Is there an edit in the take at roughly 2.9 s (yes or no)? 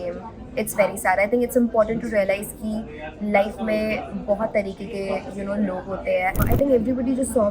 no